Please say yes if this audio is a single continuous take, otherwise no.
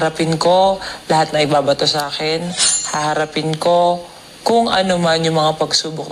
yes